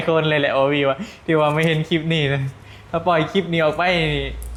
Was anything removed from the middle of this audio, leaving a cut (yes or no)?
no